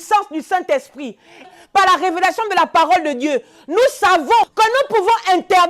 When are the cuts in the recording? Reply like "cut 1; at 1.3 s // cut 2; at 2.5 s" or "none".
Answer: cut 1; at 1.5 s // cut 2; at 4.5 s